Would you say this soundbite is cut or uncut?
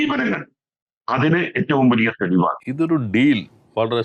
cut